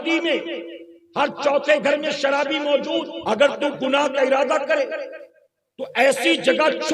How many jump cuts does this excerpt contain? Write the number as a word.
one